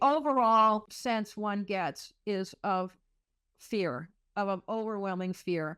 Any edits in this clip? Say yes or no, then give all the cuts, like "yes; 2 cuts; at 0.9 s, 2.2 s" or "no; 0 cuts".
yes; 1 cut; at 0.9 s